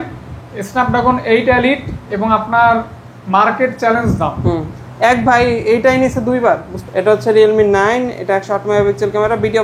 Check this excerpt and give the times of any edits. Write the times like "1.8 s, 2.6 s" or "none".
6.7 s